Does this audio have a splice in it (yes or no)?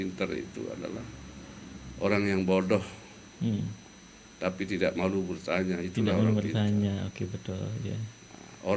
no